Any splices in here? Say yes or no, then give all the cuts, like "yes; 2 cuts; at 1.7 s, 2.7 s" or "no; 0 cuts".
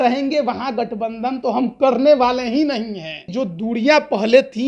yes; 1 cut; at 3.2 s